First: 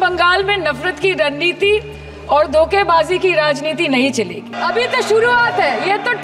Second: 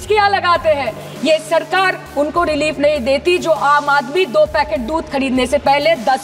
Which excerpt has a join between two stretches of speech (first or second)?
first